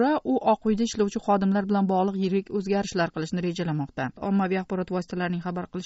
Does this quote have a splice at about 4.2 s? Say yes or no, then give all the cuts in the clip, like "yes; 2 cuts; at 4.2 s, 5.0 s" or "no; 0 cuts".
yes; 1 cut; at 4.2 s